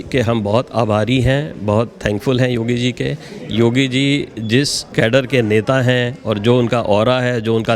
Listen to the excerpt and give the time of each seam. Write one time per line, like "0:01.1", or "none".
0:03.3
0:04.8